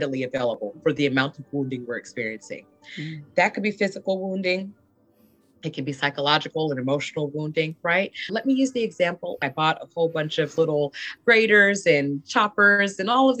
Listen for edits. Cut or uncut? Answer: cut